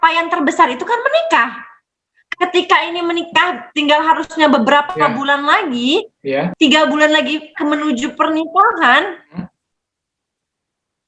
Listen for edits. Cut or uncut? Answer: cut